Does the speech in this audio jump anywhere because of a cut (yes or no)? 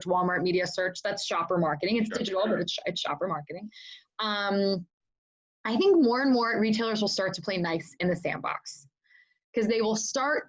no